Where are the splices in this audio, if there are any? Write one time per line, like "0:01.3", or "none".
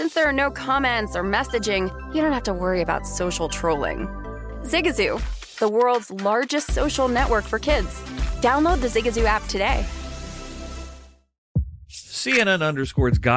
0:11.5